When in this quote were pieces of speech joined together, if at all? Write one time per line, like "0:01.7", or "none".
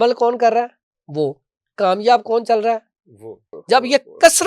0:03.5